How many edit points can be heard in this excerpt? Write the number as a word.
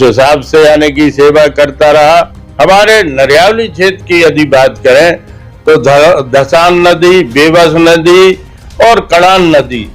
one